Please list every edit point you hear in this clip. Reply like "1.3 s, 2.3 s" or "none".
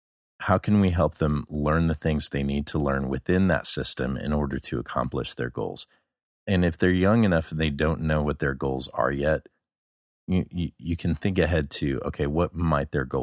none